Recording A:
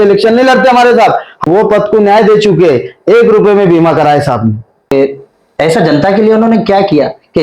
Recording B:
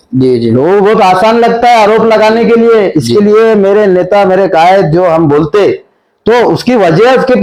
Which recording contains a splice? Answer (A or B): A